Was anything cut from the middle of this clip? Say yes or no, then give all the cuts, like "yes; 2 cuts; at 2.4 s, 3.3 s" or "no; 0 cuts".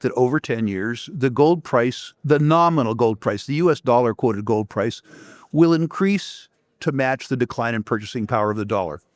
yes; 1 cut; at 2.1 s